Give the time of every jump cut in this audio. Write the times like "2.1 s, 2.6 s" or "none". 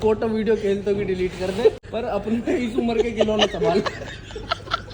1.8 s